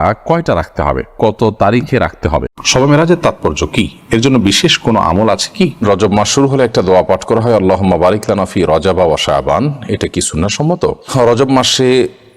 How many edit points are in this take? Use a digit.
3